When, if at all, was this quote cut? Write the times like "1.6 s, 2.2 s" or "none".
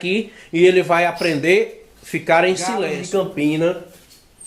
3.0 s